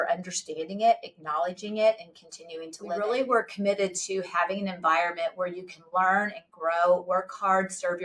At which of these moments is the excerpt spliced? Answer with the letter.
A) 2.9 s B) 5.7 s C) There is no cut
A